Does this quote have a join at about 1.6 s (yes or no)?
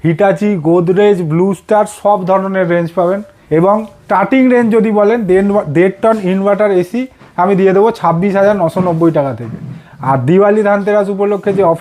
no